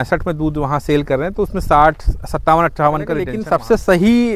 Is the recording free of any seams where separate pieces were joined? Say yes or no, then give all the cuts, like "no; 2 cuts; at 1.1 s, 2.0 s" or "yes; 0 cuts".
no; 1 cut; at 3.3 s